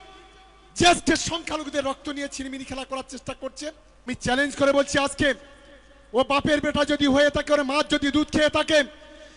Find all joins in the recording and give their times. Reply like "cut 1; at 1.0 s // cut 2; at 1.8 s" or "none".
cut 1; at 4.1 s